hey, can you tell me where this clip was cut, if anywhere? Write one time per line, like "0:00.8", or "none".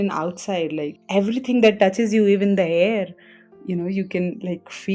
0:01.0